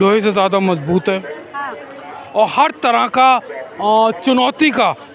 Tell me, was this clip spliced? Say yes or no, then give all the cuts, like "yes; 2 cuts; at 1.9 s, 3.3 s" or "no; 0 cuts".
no; 0 cuts